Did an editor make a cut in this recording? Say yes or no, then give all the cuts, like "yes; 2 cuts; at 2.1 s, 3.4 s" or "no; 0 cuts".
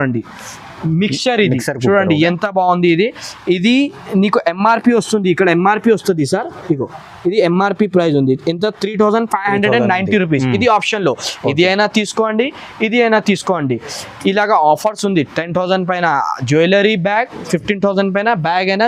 no; 0 cuts